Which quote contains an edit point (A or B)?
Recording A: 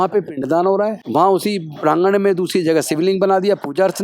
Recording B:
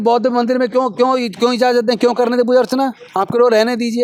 A